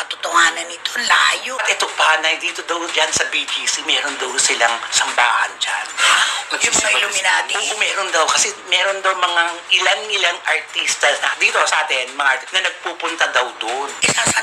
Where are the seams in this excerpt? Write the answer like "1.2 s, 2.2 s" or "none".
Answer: 1.6 s